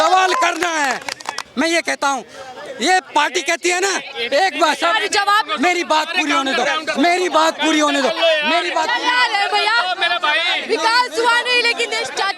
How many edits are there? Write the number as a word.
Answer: zero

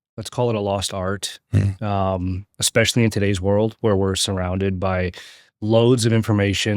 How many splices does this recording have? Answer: zero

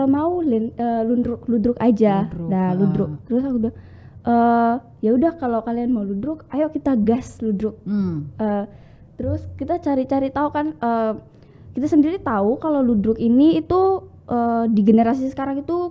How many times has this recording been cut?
zero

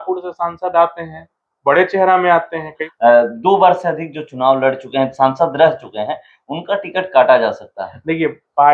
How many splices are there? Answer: one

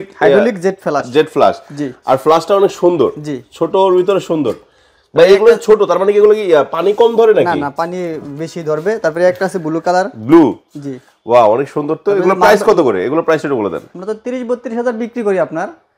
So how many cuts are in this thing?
zero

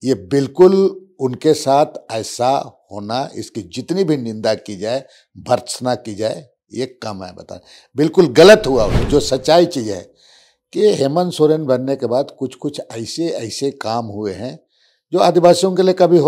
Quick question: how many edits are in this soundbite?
one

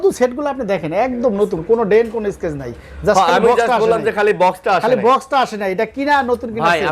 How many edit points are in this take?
zero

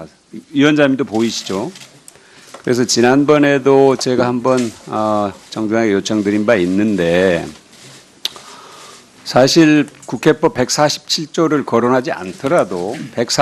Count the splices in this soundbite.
one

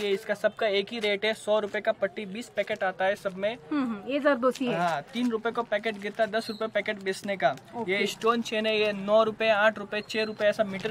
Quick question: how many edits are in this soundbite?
zero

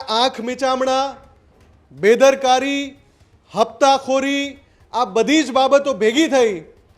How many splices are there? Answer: zero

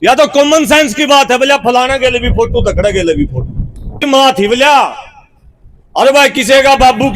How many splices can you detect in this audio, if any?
one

